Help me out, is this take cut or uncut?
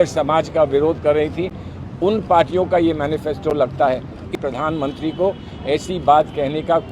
cut